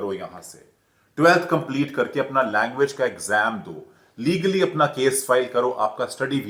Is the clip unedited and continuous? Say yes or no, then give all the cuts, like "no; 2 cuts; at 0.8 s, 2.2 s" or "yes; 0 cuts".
yes; 0 cuts